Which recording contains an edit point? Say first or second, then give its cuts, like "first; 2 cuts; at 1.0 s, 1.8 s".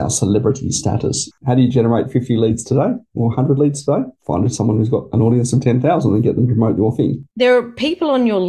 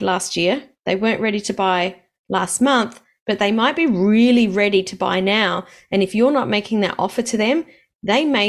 first; 3 cuts; at 1.3 s, 4.2 s, 7.2 s